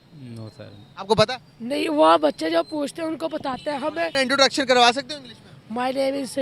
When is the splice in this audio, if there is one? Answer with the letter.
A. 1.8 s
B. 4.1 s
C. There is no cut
B